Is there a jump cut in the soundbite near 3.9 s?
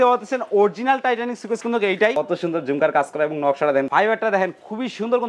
yes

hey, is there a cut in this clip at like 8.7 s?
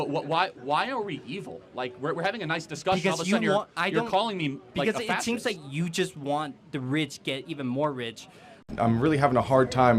yes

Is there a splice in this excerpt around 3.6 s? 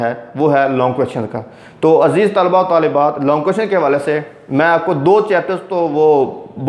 no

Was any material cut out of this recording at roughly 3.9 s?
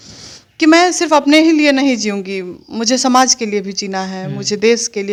no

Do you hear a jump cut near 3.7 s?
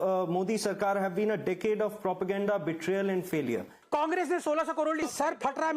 yes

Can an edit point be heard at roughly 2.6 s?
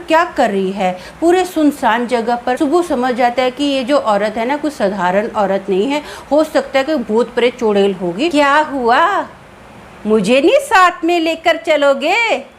yes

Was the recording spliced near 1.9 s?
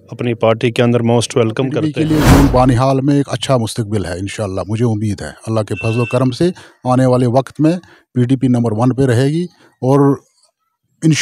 yes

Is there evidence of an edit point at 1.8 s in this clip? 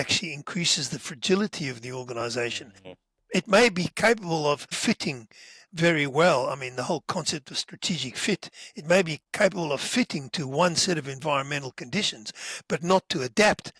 no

